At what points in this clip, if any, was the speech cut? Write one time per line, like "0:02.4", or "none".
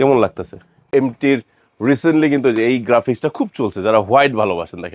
0:00.9